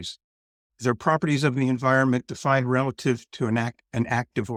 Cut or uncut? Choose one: uncut